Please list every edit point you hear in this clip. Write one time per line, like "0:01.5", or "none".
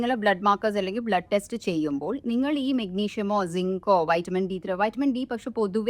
none